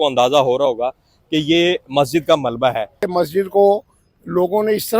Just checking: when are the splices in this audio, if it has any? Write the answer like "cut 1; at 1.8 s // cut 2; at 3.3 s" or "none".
cut 1; at 3.1 s